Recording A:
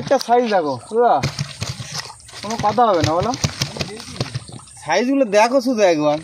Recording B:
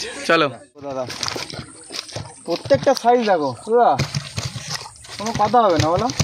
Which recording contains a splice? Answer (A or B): B